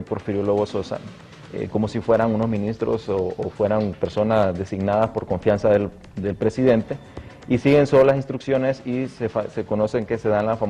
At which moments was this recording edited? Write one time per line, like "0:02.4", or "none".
none